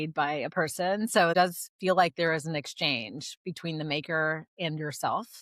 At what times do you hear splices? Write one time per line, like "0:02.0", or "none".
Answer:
0:01.4